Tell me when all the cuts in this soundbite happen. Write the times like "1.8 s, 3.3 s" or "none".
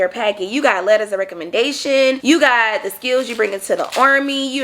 2.2 s